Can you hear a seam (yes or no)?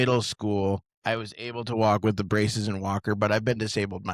yes